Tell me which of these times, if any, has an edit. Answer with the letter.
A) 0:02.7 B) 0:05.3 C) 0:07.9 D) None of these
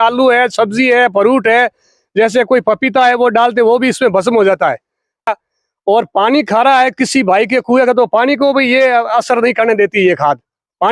B